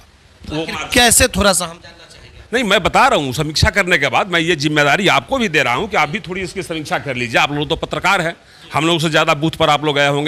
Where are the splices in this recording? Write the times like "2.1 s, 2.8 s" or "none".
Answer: none

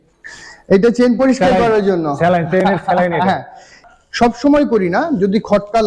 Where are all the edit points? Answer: 3.7 s

